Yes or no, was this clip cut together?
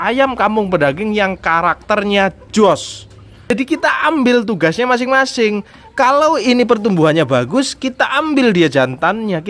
yes